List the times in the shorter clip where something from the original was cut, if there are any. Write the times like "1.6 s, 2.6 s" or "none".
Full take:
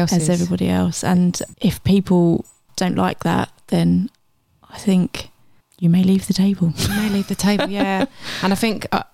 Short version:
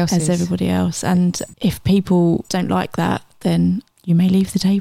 2.5 s, 3.9 s